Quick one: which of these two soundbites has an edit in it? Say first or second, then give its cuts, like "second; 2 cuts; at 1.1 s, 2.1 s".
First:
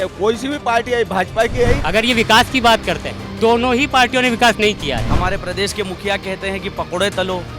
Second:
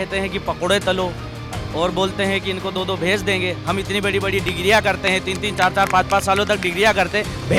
first; 2 cuts; at 1.8 s, 5.1 s